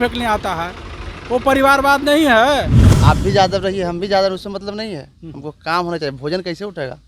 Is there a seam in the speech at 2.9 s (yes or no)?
yes